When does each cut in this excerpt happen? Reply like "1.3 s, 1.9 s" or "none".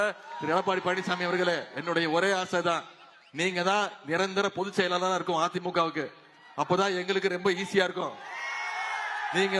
none